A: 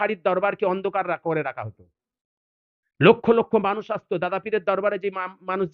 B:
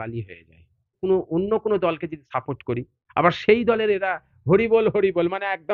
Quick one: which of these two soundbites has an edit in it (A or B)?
B